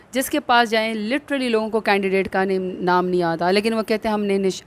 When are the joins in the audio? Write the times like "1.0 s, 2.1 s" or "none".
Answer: none